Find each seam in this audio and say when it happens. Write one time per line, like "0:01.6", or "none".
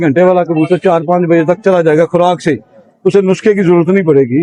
none